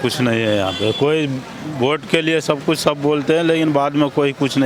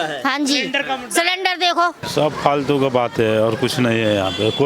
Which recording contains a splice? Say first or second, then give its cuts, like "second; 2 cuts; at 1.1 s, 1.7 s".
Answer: second; 1 cut; at 2.0 s